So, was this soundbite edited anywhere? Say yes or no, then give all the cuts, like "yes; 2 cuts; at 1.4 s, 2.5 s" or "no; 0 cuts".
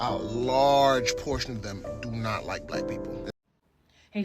yes; 1 cut; at 3.3 s